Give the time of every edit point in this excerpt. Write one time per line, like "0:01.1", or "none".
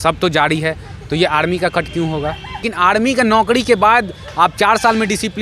0:02.7